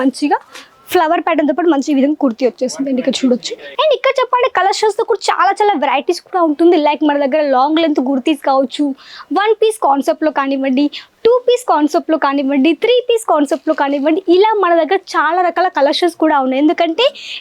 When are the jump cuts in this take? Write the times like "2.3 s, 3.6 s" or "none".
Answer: 3.6 s